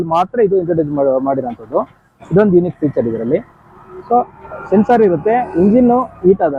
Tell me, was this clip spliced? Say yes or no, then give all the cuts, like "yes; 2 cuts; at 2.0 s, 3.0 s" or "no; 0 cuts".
no; 0 cuts